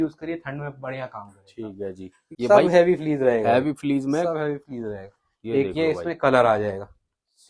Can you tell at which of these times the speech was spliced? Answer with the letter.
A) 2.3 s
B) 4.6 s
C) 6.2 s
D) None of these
A